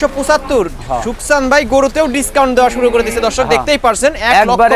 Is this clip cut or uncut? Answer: uncut